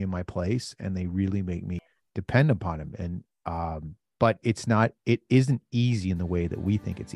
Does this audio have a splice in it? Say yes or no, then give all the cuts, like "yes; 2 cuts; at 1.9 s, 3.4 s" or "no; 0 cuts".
yes; 1 cut; at 1.9 s